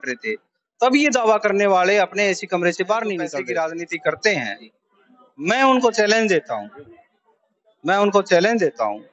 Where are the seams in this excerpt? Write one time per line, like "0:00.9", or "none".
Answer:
0:03.4